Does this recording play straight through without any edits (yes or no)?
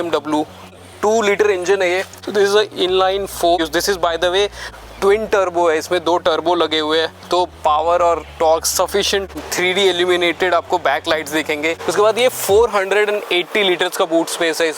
no